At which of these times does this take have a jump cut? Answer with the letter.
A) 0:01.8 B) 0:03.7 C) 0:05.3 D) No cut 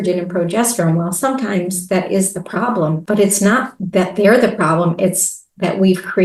D